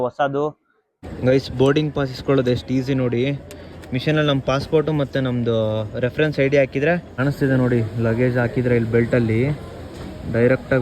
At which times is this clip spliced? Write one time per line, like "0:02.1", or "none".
0:00.9
0:07.1